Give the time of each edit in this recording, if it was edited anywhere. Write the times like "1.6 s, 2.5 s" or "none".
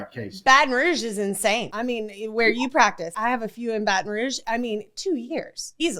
1.7 s, 3.2 s, 4.4 s

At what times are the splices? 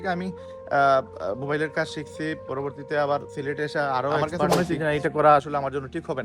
4.4 s

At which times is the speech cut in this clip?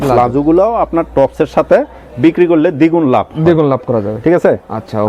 none

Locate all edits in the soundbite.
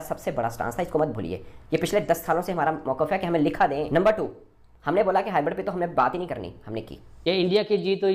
3.9 s, 7.1 s

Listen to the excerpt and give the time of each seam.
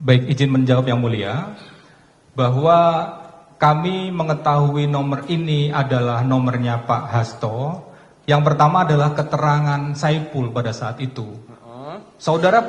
none

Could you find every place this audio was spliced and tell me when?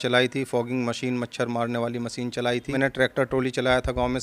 2.8 s

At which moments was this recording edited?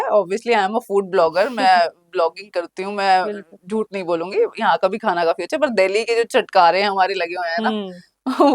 none

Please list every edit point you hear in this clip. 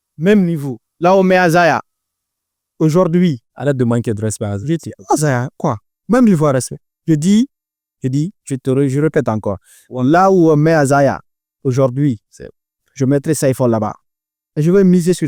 none

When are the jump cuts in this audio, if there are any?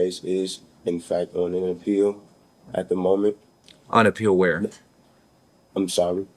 none

